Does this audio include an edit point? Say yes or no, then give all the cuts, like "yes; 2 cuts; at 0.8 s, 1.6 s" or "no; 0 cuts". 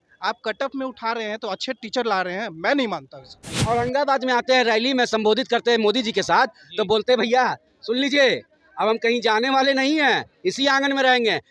yes; 1 cut; at 3.5 s